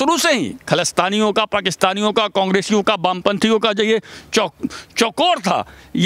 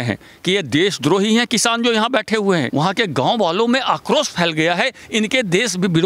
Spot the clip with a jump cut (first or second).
second